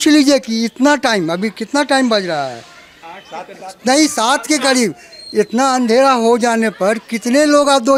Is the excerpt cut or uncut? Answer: uncut